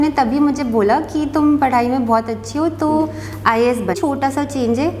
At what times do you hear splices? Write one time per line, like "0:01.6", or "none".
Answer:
0:04.0